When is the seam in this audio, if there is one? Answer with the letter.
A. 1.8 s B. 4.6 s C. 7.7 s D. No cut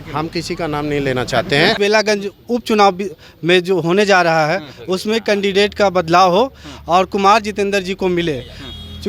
A